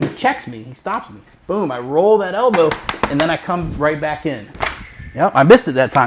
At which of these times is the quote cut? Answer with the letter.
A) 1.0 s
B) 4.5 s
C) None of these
B